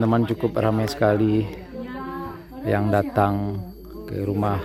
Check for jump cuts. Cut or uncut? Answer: uncut